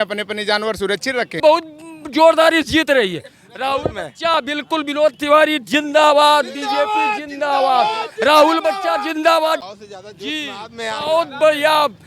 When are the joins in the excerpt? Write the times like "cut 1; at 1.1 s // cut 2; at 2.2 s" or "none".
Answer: cut 1; at 1.3 s // cut 2; at 9.7 s